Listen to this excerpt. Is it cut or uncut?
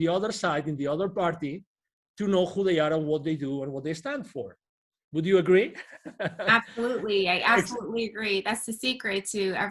uncut